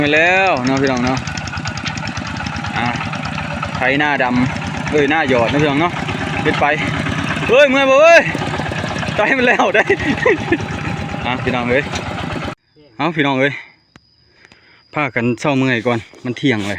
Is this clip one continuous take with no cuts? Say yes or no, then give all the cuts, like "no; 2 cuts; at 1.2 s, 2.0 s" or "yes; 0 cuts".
no; 1 cut; at 12.6 s